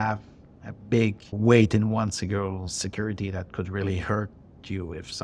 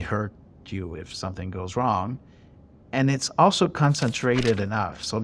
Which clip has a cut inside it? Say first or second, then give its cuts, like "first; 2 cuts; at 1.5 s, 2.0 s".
first; 1 cut; at 1.3 s